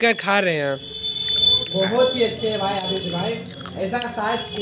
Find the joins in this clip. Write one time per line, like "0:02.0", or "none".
none